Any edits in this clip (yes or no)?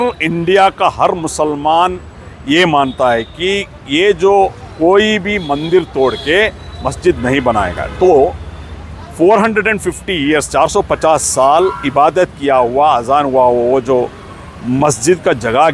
no